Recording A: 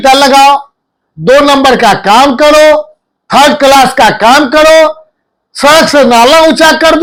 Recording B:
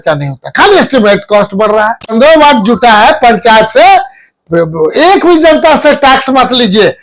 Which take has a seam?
B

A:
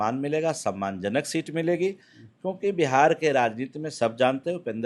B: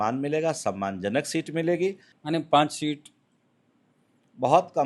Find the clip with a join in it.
B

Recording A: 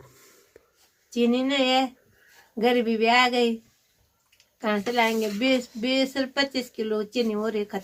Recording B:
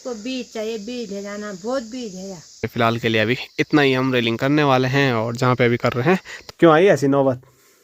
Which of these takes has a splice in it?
B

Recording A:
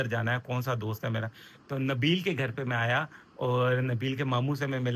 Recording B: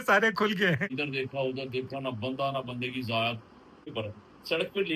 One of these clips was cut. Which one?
B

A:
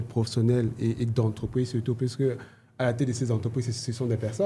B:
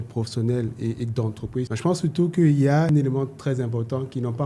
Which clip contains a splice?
B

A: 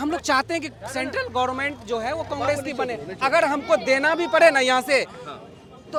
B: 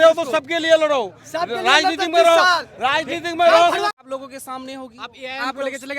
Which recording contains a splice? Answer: B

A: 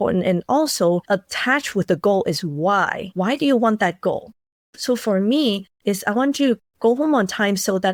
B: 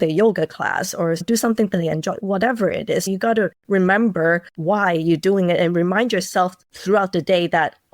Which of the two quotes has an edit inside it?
B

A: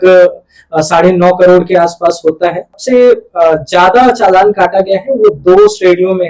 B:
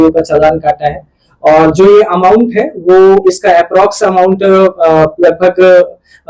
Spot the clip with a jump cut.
A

